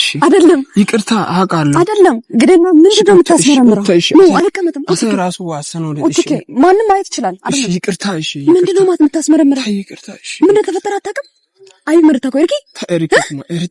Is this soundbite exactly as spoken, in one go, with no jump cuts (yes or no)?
yes